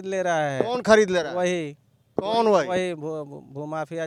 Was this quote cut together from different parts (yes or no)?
no